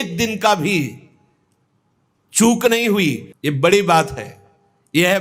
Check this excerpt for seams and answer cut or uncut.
cut